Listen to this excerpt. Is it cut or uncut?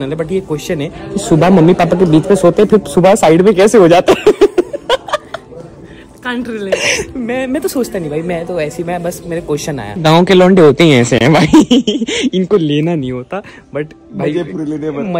uncut